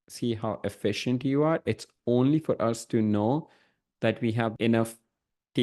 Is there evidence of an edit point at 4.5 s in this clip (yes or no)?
yes